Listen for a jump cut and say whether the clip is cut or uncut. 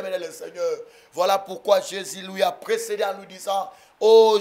uncut